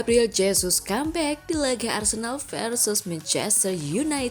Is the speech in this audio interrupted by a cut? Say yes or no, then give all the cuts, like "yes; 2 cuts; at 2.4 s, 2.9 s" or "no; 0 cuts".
no; 0 cuts